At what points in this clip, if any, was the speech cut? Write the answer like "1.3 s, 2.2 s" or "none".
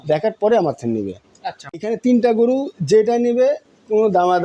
1.8 s